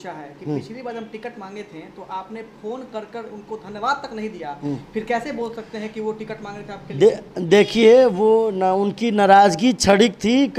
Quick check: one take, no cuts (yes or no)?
yes